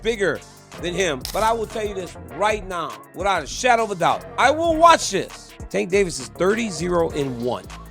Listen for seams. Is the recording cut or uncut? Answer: cut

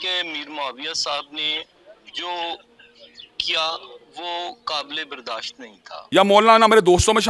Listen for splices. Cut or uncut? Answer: cut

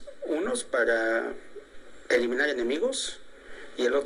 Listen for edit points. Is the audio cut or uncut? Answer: uncut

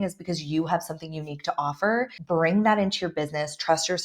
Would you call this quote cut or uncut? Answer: cut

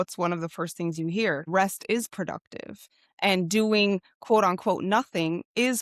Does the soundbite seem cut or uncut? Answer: cut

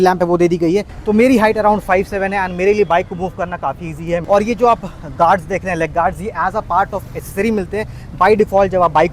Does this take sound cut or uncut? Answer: cut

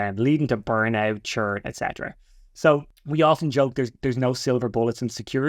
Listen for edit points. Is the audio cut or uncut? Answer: cut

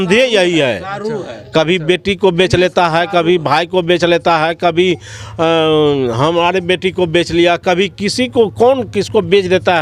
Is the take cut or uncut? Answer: uncut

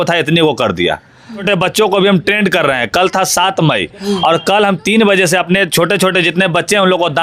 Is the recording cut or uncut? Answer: cut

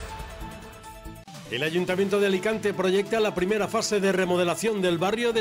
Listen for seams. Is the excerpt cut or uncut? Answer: cut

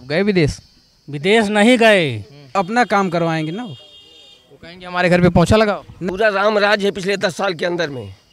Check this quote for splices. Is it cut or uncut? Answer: cut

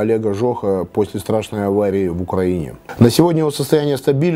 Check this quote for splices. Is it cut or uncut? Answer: uncut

